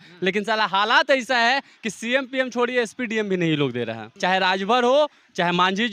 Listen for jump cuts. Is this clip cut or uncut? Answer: cut